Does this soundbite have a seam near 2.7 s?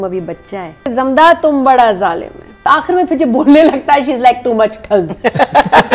yes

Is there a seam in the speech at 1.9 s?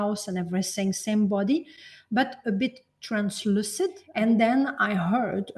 no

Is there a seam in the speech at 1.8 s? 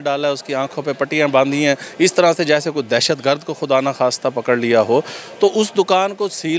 no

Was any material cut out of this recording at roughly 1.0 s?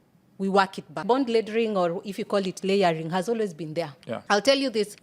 yes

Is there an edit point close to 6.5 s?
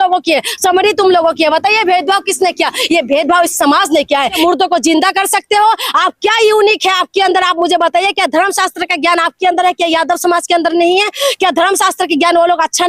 no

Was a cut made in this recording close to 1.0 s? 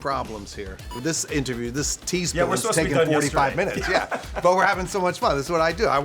yes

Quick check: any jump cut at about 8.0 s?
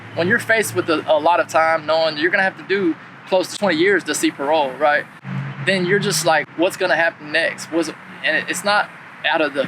no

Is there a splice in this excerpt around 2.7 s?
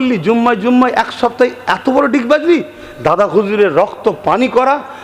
no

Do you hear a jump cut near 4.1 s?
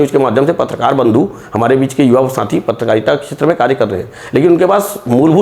no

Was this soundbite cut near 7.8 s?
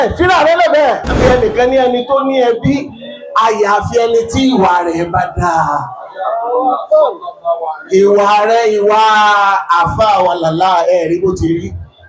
no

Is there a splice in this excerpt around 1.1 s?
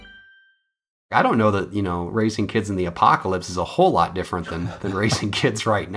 yes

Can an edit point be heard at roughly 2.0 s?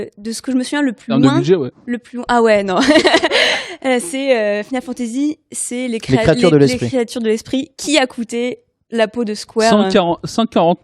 no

